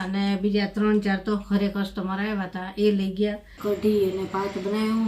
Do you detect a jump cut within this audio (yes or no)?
yes